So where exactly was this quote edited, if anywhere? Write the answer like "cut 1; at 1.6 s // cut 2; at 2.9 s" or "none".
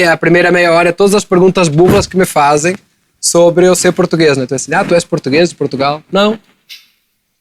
none